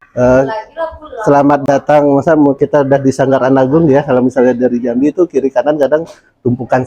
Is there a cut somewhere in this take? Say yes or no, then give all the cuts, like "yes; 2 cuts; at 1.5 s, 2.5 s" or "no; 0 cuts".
no; 0 cuts